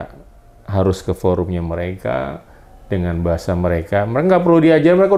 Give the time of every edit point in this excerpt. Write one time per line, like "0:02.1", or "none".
none